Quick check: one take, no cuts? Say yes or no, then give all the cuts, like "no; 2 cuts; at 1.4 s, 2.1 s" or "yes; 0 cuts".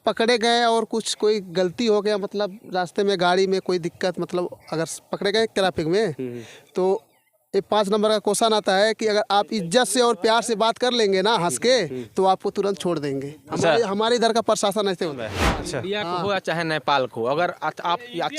no; 1 cut; at 15.3 s